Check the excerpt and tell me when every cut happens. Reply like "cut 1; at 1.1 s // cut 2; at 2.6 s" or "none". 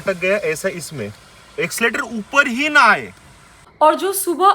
cut 1; at 3.7 s